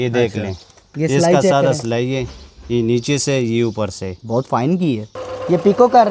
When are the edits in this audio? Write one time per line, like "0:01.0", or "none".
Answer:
0:05.2

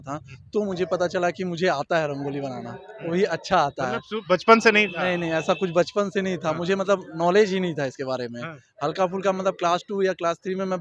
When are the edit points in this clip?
none

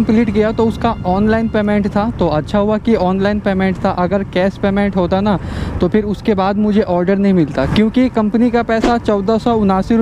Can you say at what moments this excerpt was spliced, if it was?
none

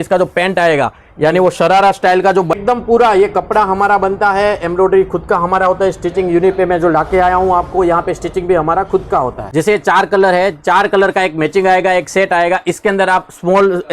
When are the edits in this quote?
0:02.6
0:09.4

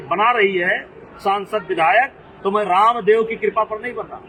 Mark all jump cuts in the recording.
none

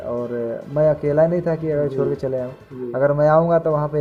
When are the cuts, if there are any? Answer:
none

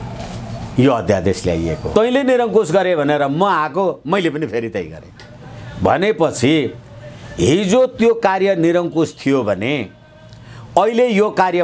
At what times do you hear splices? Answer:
0:01.9

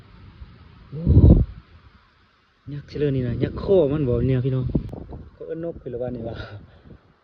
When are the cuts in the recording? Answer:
0:04.9

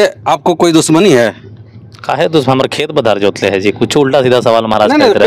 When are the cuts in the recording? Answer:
none

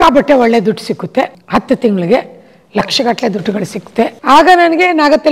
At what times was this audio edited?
0:01.4
0:04.2

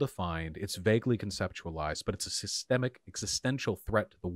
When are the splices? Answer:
none

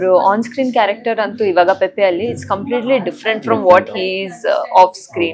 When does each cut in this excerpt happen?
none

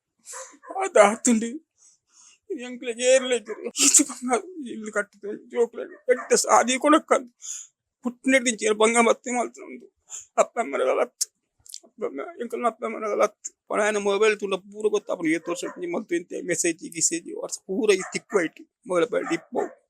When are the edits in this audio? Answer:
0:03.6
0:13.7

